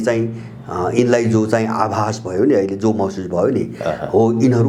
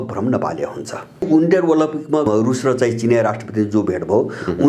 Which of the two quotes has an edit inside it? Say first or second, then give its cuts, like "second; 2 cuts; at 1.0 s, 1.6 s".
second; 2 cuts; at 1.2 s, 2.3 s